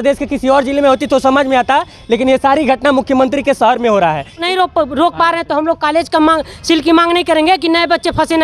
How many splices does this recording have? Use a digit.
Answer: 1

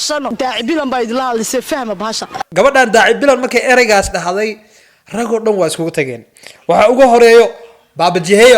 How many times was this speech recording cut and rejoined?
0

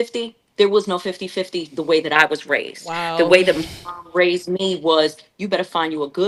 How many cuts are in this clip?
0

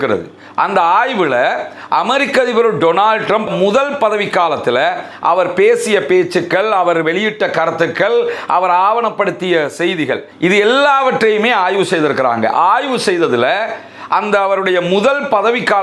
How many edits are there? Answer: 1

